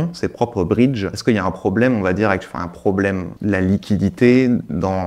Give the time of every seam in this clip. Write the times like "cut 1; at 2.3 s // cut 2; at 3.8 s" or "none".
cut 1; at 1.1 s // cut 2; at 3.3 s